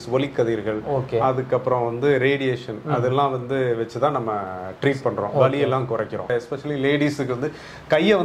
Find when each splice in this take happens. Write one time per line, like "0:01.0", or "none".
0:06.3